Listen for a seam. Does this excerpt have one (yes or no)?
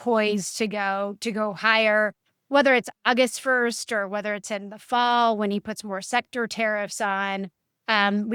no